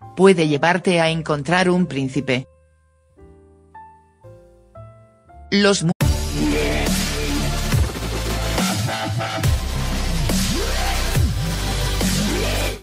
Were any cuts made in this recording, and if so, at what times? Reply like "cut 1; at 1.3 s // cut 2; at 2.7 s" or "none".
none